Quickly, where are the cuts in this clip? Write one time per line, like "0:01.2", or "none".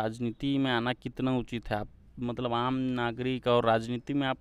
none